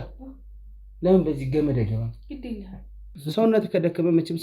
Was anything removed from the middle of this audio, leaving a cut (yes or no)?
yes